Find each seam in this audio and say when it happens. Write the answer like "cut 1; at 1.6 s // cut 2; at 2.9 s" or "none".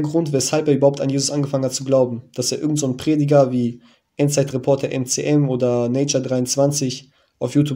none